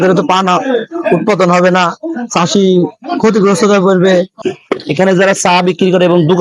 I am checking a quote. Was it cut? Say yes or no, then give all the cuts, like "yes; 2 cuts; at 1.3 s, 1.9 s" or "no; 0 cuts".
yes; 1 cut; at 4.4 s